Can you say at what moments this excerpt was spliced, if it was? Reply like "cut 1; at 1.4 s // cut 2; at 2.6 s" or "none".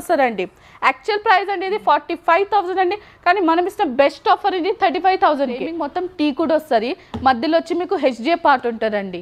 cut 1; at 5.8 s